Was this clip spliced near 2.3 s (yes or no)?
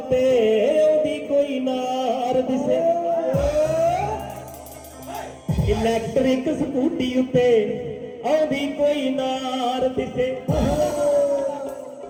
no